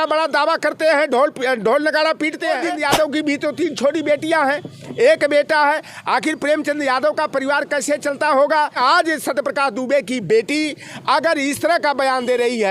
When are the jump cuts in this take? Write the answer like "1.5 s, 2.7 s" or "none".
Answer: 2.7 s, 8.8 s